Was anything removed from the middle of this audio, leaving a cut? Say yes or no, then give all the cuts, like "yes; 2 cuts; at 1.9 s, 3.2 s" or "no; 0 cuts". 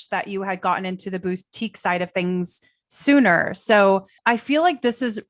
no; 0 cuts